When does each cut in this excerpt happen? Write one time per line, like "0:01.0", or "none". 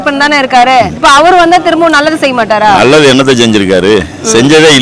0:00.9